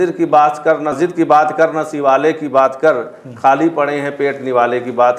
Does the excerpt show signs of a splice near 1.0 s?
yes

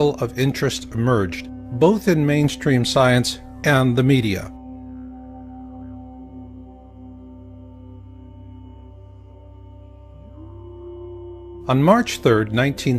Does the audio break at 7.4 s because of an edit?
yes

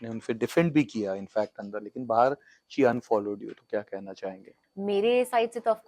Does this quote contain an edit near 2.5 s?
no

